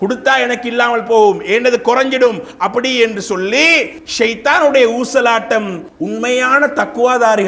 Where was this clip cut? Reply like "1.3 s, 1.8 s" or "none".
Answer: none